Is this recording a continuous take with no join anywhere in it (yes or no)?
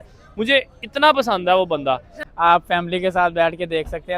no